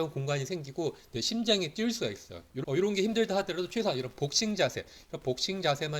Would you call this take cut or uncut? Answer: cut